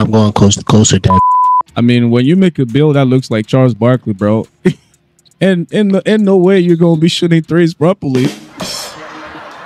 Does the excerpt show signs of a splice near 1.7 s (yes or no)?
yes